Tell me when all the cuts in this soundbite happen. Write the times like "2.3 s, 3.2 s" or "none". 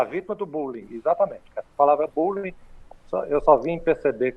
none